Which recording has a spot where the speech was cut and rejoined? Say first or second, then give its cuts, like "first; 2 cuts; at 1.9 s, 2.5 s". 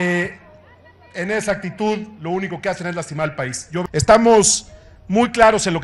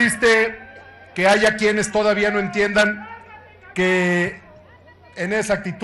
first; 1 cut; at 3.8 s